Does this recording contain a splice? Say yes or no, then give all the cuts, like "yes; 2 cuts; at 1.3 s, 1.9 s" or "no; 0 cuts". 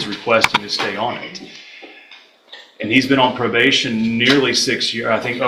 no; 0 cuts